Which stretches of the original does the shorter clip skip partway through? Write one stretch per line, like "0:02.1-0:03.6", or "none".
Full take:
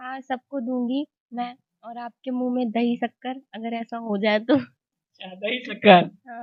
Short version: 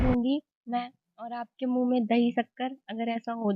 none